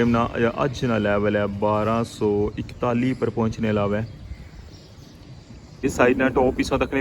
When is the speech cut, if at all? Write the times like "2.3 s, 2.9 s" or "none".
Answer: 5.8 s